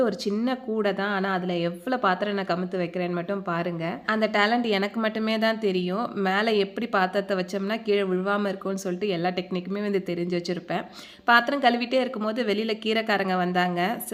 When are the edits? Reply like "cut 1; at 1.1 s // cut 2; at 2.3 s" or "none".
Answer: none